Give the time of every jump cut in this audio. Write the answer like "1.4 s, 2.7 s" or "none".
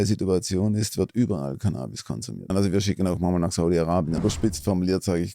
2.5 s, 4.2 s